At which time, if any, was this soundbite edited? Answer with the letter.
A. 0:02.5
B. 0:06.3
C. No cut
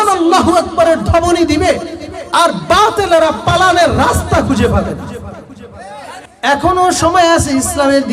B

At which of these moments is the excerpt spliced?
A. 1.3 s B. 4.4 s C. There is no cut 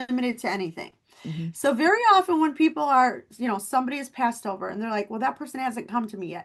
C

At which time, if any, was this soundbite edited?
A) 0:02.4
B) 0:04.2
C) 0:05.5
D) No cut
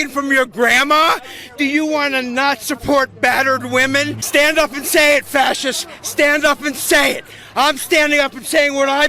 B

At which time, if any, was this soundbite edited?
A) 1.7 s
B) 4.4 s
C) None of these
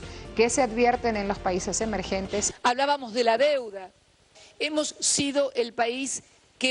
B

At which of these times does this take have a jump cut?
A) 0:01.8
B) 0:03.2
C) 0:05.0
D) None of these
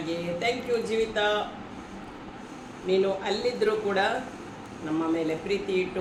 D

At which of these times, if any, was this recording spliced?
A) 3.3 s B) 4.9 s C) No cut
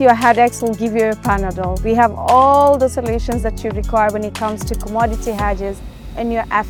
C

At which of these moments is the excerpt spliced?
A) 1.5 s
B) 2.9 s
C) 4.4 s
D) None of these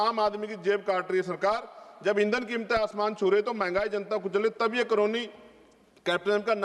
D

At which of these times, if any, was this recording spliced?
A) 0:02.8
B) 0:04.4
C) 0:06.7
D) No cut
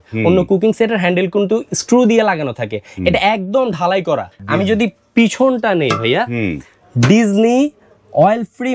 B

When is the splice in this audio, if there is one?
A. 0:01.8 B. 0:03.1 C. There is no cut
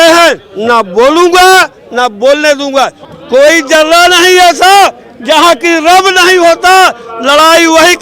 B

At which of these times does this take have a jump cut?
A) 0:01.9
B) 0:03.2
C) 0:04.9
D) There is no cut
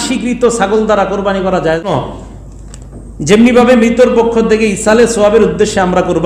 A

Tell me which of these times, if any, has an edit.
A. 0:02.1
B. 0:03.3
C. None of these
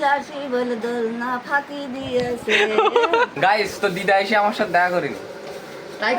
B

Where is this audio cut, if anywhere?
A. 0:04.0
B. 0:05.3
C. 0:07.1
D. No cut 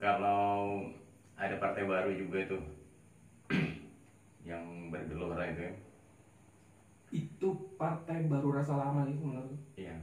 D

